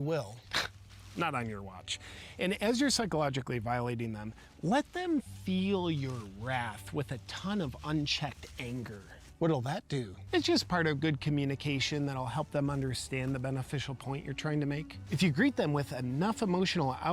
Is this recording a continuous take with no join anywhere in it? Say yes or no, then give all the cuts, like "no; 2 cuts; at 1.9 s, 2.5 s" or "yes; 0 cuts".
no; 1 cut; at 2.3 s